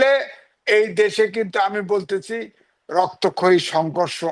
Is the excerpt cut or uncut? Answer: uncut